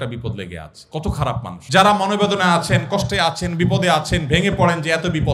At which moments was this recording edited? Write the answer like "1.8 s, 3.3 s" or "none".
1.5 s